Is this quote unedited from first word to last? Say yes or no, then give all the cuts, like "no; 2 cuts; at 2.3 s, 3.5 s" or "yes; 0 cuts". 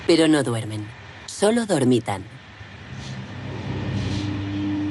yes; 0 cuts